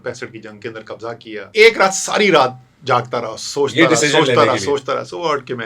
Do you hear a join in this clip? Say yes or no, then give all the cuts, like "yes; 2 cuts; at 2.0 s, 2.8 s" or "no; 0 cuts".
yes; 1 cut; at 1.5 s